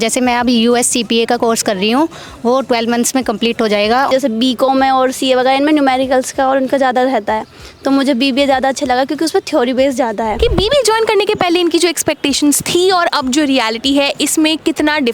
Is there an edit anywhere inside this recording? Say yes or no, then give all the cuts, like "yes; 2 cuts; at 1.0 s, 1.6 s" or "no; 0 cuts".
yes; 2 cuts; at 4.1 s, 10.3 s